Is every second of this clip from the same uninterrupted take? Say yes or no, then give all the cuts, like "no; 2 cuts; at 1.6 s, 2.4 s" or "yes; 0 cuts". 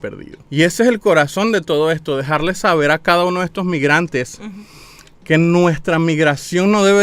yes; 0 cuts